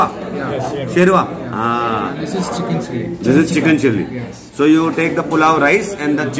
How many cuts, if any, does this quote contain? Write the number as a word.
zero